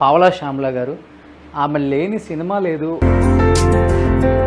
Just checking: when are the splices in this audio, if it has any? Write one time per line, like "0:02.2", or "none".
0:03.0